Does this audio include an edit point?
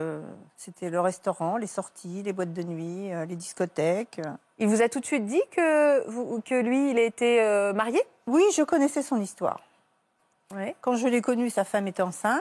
no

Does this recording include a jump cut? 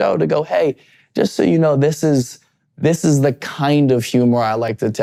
no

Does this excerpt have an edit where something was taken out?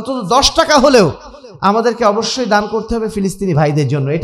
no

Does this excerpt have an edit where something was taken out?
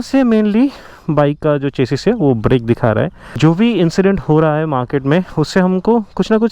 yes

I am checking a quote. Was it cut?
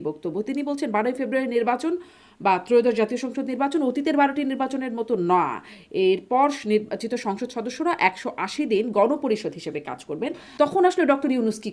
yes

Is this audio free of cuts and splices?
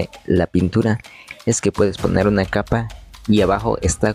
yes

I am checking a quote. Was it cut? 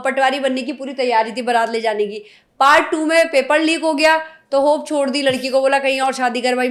no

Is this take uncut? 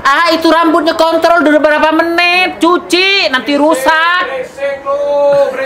yes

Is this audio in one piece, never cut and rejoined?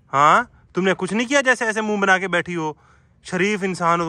yes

